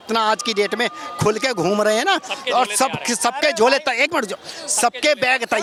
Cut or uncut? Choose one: uncut